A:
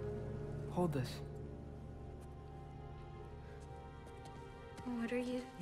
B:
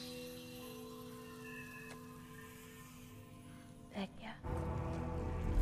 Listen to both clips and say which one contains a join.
B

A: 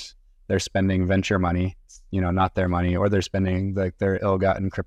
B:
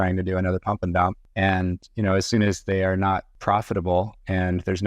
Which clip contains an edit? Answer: B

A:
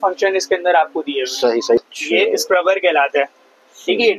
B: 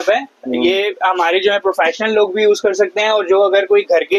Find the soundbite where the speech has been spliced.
A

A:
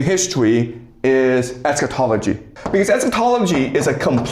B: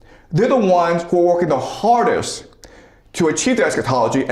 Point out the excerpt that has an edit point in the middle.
A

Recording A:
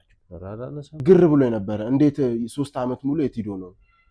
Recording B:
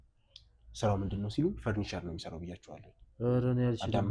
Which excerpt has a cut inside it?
A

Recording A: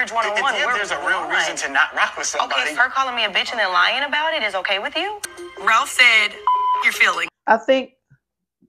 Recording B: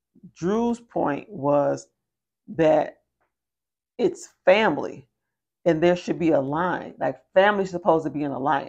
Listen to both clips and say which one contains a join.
A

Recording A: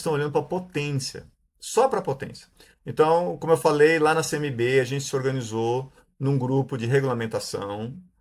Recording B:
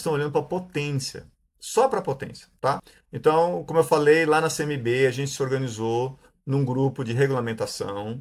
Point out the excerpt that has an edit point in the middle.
A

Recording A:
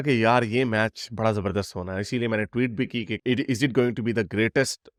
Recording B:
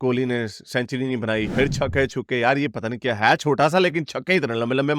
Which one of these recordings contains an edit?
B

